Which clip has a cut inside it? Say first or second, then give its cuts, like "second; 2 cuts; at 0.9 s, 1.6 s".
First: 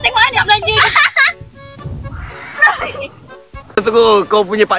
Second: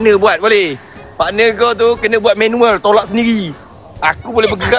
first; 1 cut; at 3.8 s